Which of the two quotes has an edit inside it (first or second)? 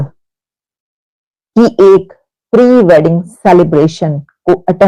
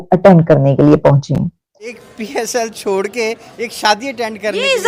second